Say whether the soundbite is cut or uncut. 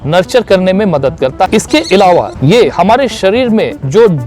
cut